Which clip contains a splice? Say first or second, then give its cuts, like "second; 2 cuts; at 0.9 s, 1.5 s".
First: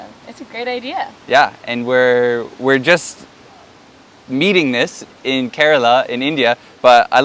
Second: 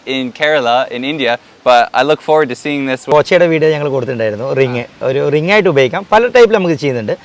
second; 1 cut; at 3.1 s